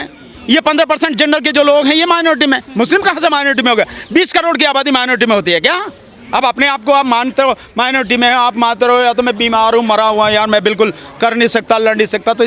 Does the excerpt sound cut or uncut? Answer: uncut